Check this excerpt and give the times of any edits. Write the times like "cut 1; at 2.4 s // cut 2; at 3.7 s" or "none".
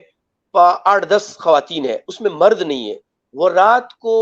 none